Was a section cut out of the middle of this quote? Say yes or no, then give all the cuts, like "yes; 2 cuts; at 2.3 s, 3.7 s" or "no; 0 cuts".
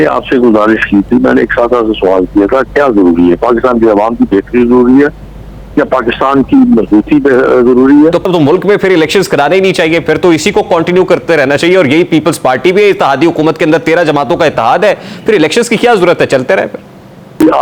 yes; 1 cut; at 8.2 s